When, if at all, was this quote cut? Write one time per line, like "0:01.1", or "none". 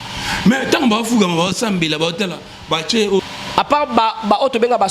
0:03.2